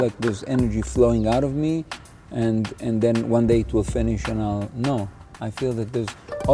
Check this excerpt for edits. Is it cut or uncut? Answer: uncut